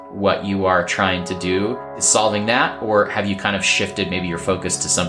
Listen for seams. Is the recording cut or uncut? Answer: cut